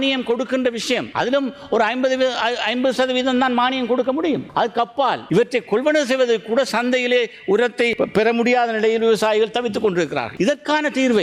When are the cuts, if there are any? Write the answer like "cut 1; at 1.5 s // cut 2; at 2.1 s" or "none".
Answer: cut 1; at 1.1 s // cut 2; at 4.8 s // cut 3; at 7.9 s // cut 4; at 10.2 s